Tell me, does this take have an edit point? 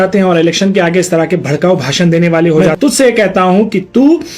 yes; 1 cut; at 2.7 s

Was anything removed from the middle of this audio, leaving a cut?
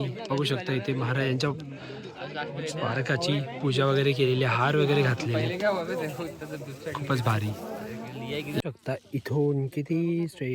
yes; 1 cut; at 8.6 s

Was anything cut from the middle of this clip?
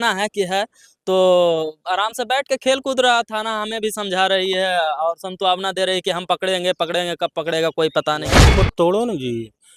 yes; 1 cut; at 8.5 s

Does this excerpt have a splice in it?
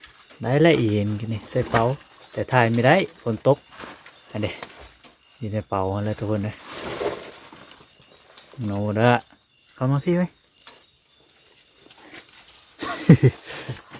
no; 0 cuts

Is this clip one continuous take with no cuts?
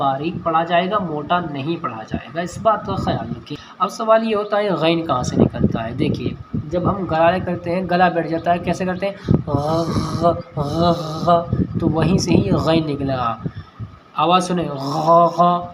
no; 1 cut; at 3.5 s

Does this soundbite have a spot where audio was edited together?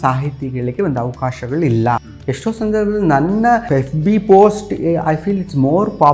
yes; 2 cuts; at 2.1 s, 3.6 s

